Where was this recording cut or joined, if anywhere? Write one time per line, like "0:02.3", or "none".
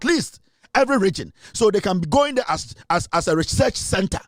none